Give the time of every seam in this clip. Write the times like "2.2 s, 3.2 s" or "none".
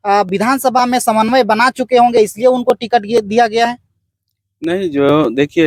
none